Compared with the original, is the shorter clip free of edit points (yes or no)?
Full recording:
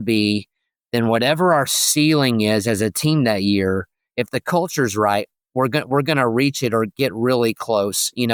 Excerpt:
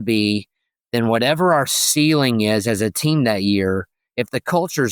yes